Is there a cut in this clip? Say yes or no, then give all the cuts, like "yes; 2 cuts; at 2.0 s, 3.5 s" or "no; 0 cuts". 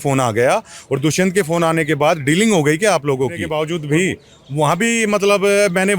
yes; 1 cut; at 3.5 s